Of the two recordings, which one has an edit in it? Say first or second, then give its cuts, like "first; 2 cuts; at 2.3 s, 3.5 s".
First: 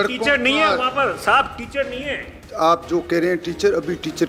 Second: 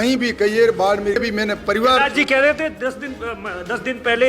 second; 1 cut; at 1.2 s